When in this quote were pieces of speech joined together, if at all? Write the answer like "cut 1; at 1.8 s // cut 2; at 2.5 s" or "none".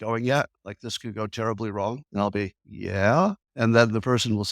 cut 1; at 2.0 s // cut 2; at 2.7 s // cut 3; at 3.5 s